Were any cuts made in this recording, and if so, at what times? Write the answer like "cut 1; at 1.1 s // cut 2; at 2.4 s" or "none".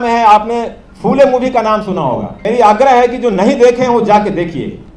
cut 1; at 2.3 s